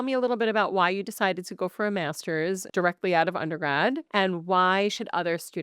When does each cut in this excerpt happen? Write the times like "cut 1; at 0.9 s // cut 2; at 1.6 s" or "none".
cut 1; at 2.6 s // cut 2; at 4.0 s